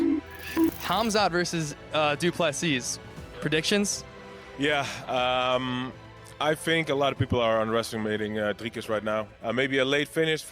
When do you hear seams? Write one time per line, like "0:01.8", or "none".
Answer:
0:00.7
0:09.3